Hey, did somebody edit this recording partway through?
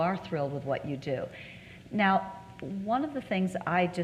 no; 0 cuts

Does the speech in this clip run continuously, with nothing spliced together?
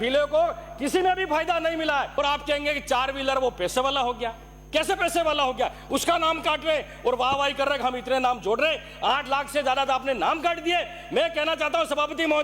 no; 1 cut; at 2.2 s

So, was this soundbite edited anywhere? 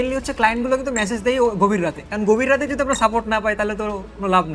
no; 0 cuts

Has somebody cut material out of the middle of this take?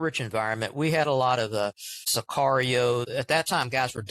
yes; 2 cuts; at 1.9 s, 3.1 s

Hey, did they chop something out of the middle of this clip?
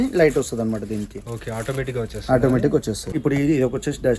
yes; 1 cut; at 3.2 s

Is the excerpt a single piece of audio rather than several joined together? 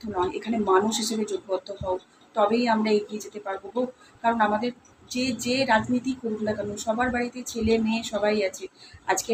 yes; 0 cuts

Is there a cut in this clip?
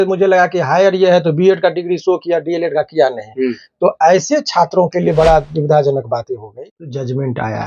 yes; 1 cut; at 6.6 s

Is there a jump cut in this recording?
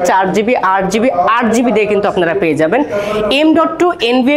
no; 0 cuts

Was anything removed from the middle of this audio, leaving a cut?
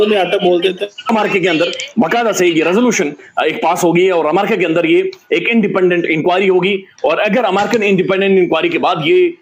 yes; 1 cut; at 1.1 s

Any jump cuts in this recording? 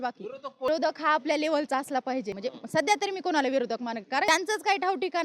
yes; 3 cuts; at 0.7 s, 2.4 s, 4.3 s

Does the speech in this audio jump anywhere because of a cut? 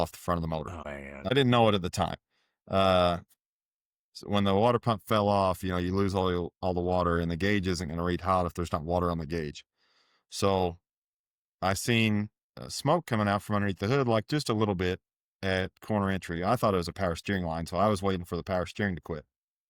yes; 1 cut; at 1.3 s

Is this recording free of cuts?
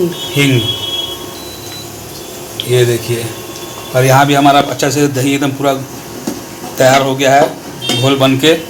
yes; 0 cuts

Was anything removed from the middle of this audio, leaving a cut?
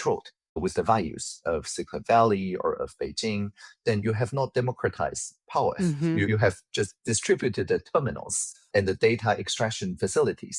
no; 0 cuts

